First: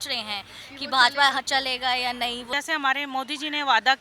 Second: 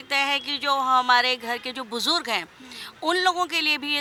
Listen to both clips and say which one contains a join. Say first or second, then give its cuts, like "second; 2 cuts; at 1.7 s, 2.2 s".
first; 1 cut; at 2.5 s